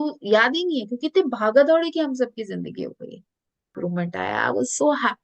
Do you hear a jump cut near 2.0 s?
no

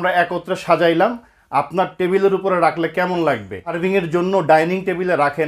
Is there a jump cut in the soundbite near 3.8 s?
yes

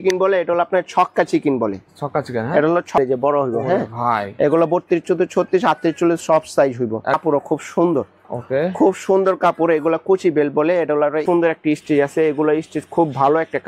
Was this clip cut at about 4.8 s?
no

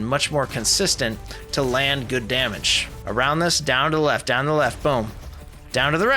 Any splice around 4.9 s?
no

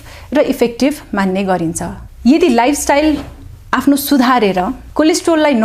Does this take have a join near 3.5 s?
no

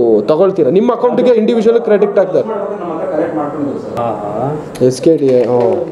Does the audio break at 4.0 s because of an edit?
yes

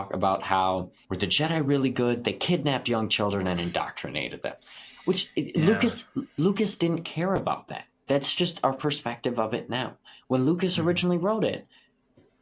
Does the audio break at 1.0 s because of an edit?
yes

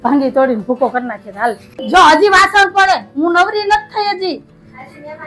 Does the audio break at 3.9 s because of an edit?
no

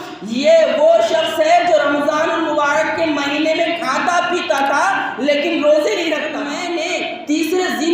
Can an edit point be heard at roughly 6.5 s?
yes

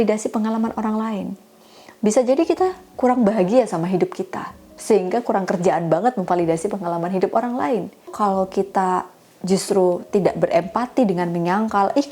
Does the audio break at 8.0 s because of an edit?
yes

